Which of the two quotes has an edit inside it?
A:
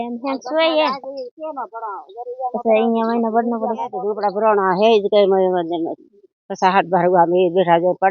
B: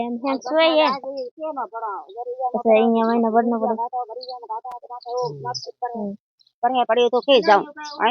A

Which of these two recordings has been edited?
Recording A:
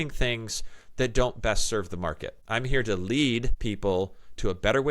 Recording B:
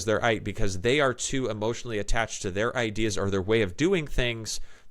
A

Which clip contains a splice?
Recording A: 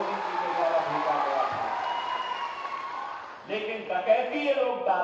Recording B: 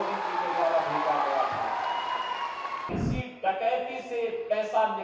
B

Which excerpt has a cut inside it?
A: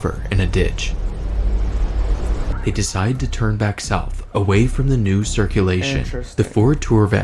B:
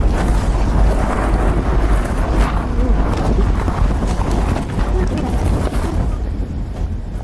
A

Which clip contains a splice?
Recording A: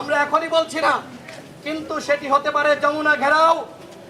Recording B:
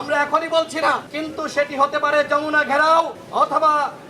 B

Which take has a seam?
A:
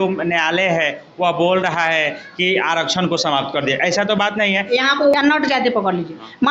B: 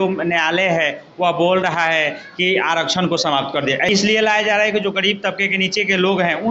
B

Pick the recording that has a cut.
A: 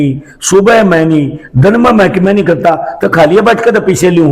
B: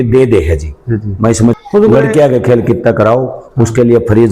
B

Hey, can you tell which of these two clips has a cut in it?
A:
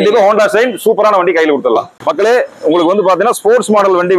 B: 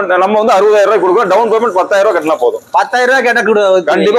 A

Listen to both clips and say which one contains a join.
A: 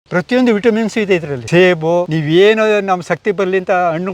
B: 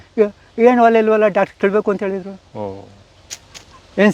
A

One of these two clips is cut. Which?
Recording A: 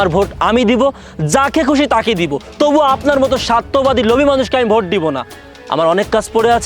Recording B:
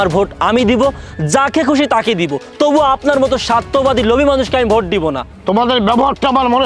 B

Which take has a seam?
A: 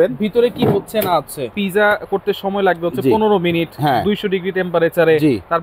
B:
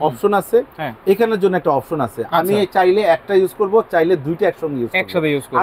A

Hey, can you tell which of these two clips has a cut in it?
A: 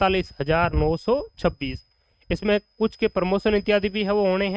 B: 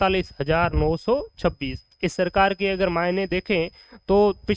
B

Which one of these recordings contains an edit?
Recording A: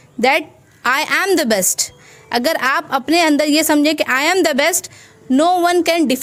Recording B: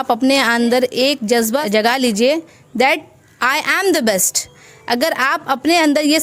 B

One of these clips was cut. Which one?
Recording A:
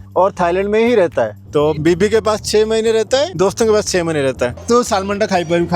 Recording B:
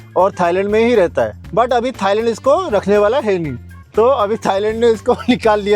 A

